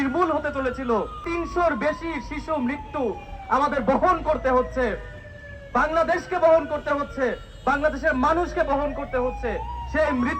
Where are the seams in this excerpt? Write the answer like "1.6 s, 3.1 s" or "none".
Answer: 1.2 s